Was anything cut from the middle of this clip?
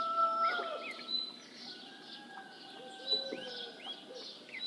no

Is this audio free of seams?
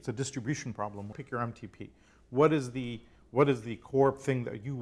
no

